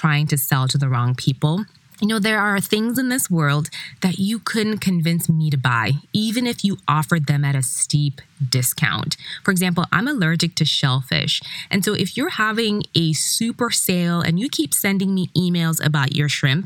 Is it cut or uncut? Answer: cut